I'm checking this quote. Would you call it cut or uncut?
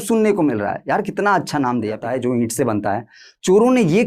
cut